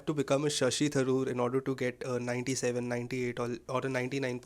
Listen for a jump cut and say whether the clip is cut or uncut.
uncut